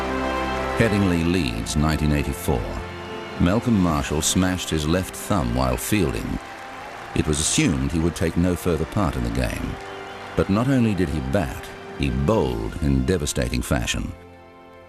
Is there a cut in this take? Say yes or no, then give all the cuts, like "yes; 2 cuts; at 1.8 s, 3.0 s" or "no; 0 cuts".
yes; 1 cut; at 13.6 s